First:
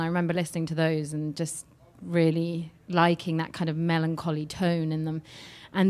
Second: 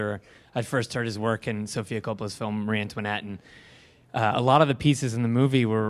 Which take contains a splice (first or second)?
second